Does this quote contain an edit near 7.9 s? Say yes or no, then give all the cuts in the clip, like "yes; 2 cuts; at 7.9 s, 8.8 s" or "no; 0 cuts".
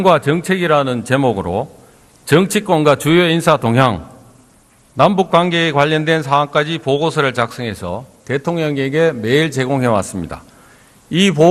no; 1 cut; at 3.8 s